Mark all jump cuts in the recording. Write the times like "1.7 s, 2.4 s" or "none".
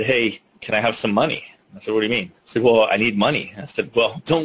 2.4 s